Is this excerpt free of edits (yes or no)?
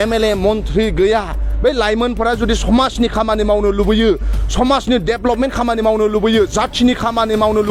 yes